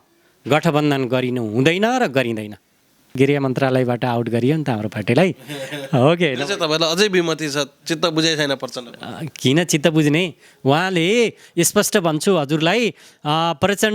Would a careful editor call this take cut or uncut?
cut